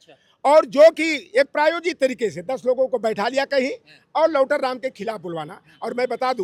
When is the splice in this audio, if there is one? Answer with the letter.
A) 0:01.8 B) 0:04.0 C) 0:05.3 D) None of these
D